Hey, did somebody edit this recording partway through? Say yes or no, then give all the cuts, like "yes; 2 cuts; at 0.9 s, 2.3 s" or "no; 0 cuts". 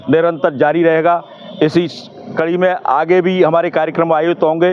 no; 0 cuts